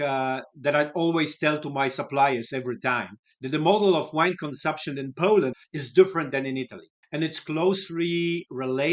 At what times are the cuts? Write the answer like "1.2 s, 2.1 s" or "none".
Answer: 5.6 s